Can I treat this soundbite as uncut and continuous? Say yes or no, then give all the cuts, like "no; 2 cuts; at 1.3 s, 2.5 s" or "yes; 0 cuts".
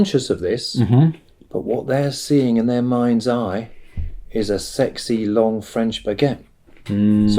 yes; 0 cuts